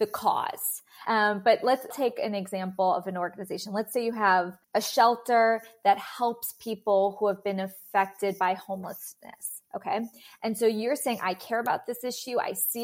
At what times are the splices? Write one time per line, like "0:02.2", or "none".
0:01.0
0:01.9
0:04.6